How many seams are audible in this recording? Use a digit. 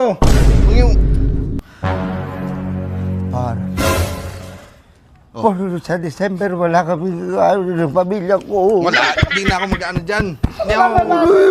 1